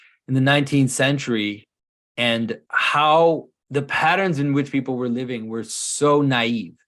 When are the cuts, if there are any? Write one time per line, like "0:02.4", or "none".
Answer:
0:02.6
0:03.5